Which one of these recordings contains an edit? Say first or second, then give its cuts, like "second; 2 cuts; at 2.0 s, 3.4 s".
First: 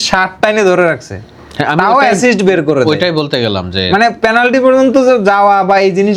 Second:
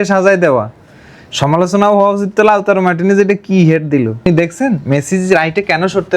second; 1 cut; at 4.2 s